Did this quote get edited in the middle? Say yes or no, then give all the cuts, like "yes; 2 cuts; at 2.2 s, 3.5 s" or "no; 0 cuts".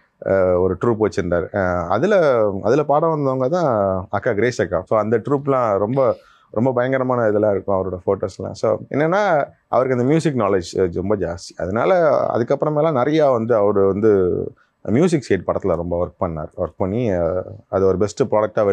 no; 0 cuts